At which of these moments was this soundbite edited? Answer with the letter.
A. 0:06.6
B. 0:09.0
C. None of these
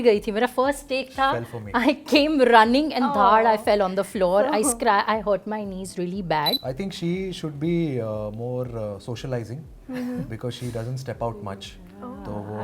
A